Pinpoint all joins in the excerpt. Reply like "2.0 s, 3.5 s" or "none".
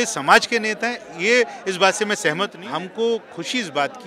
2.6 s